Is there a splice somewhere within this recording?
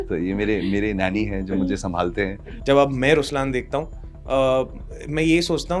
yes; 1 cut; at 2.5 s

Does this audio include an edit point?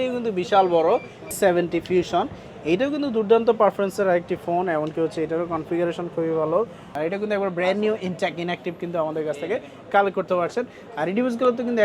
yes; 2 cuts; at 1.3 s, 6.9 s

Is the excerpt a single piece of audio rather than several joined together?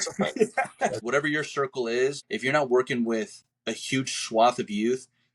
no; 2 cuts; at 1.0 s, 2.3 s

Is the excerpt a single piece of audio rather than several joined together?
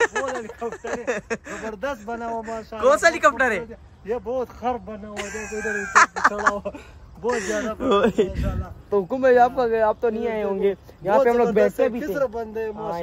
yes; 0 cuts

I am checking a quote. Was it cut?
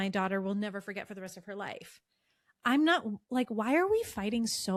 no; 0 cuts

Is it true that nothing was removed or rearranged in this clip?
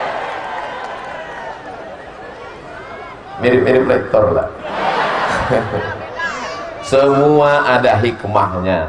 yes; 0 cuts

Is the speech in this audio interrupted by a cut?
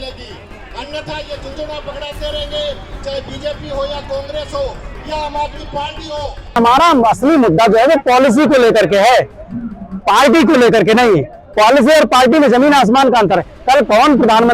yes; 1 cut; at 6.6 s

